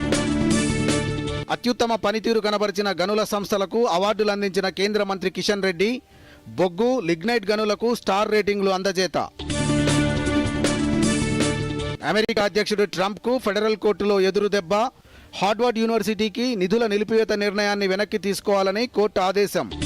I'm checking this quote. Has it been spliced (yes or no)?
yes